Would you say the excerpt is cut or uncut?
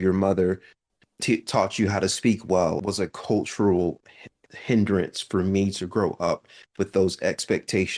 cut